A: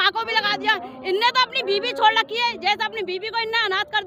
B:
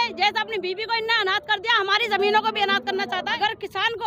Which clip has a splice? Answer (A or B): B